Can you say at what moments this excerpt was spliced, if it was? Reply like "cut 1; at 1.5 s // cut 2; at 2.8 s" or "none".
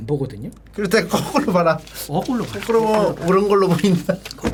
none